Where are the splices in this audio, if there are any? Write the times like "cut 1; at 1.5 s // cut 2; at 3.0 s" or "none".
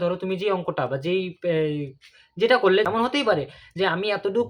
cut 1; at 2.9 s